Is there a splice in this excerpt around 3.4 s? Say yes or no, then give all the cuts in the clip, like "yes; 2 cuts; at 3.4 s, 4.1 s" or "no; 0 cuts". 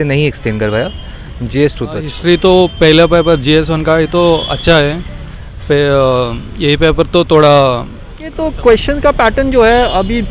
no; 2 cuts; at 2.1 s, 8.4 s